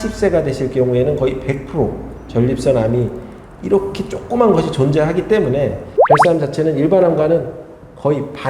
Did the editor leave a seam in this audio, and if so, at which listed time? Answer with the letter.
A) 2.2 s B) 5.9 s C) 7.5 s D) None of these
B